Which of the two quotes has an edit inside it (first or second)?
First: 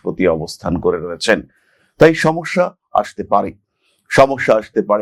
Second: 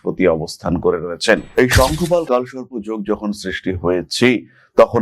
second